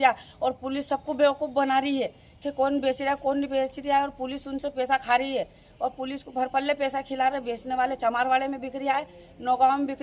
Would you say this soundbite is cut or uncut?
uncut